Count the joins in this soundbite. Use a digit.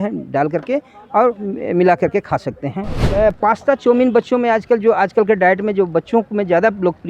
1